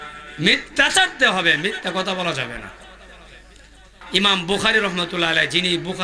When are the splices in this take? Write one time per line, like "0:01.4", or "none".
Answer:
0:04.0